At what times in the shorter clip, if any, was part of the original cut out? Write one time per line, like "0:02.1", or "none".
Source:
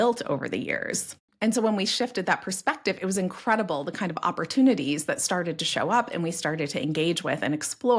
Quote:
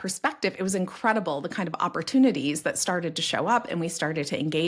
none